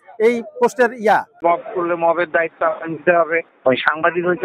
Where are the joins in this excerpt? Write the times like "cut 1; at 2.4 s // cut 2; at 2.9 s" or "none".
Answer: cut 1; at 1.4 s // cut 2; at 3.4 s